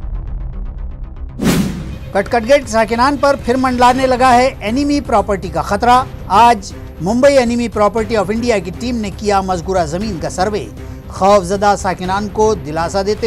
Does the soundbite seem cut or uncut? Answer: uncut